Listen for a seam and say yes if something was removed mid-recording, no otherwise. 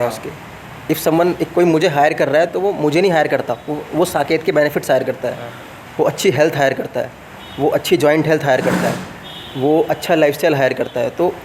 no